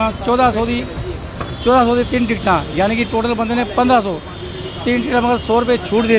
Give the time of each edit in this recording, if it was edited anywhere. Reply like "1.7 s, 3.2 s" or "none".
none

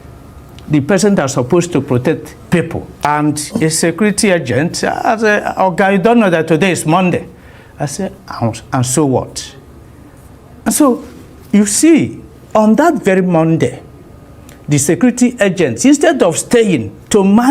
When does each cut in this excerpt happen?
3.1 s

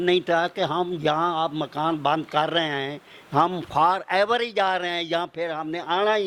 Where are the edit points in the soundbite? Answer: none

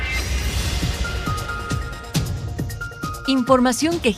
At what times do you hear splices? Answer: 3.2 s

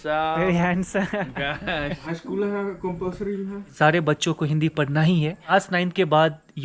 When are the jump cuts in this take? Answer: 2.0 s, 3.6 s, 5.5 s

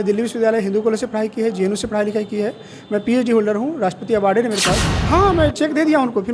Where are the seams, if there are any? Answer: 4.9 s

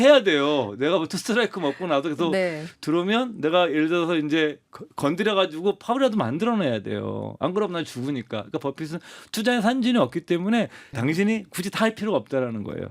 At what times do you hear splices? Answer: 10.9 s

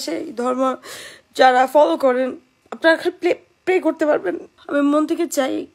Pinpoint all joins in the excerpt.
2.6 s, 4.5 s

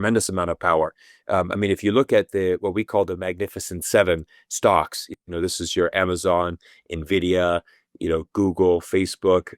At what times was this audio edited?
none

